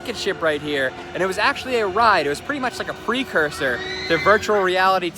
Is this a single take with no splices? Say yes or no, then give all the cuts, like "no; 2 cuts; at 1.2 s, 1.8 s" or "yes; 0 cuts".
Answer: yes; 0 cuts